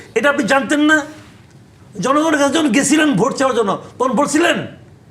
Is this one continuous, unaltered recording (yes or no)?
yes